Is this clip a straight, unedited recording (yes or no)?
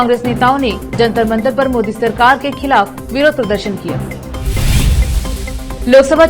yes